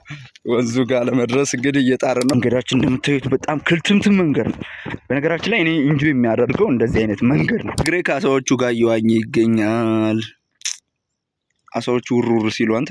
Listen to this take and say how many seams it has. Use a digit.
2